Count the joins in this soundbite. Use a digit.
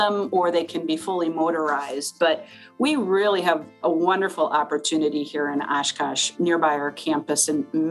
1